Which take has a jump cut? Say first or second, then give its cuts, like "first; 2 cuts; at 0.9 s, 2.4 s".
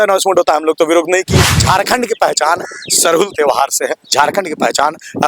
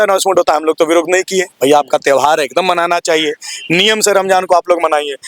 first; 1 cut; at 1.4 s